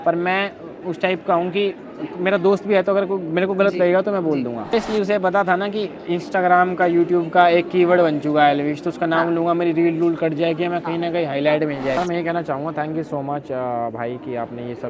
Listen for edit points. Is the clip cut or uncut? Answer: cut